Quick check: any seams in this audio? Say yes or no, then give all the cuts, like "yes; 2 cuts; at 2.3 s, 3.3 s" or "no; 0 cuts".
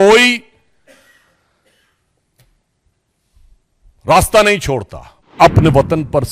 yes; 1 cut; at 5.4 s